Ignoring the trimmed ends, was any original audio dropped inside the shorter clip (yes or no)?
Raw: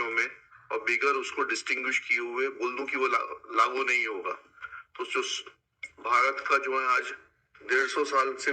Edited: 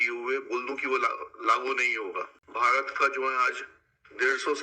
yes